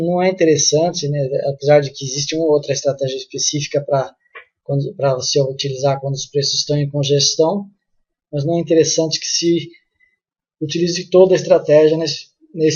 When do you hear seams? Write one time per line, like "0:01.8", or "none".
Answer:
0:11.2